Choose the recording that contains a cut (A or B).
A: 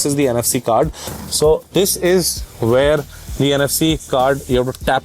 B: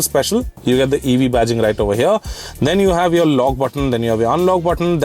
A